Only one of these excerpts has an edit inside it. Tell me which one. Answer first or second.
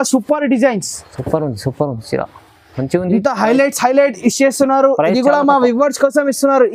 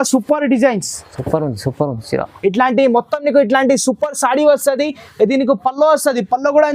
second